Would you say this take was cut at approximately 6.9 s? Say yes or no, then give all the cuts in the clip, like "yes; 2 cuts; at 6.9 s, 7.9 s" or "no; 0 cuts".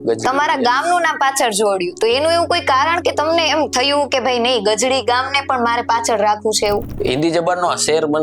yes; 1 cut; at 6.9 s